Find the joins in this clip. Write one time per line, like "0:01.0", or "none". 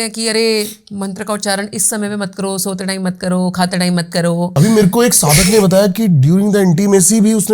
0:04.5